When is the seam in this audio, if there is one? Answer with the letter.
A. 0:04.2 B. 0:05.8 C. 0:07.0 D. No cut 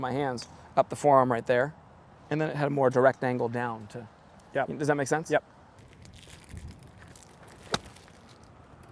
B